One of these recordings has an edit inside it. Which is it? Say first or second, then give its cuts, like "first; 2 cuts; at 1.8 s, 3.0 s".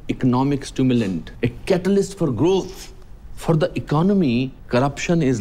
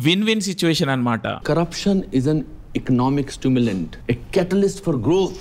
second; 1 cut; at 1.4 s